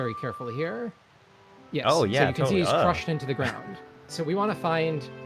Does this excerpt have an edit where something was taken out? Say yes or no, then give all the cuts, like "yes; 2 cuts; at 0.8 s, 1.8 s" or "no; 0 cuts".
yes; 1 cut; at 4.1 s